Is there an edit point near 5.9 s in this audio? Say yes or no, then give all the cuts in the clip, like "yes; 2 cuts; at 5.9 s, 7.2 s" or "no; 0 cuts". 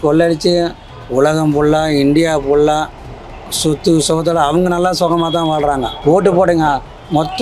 yes; 1 cut; at 5.9 s